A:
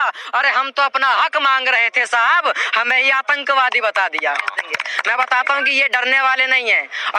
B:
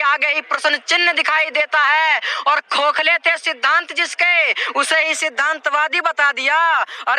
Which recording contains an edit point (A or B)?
A